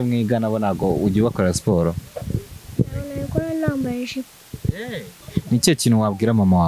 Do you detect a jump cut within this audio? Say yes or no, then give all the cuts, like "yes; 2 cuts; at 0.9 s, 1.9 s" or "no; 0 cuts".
yes; 1 cut; at 5.2 s